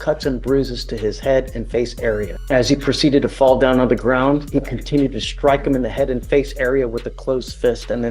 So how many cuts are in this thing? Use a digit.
1